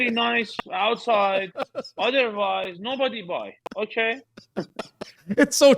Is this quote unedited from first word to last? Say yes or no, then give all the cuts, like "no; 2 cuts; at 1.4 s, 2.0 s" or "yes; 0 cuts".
yes; 0 cuts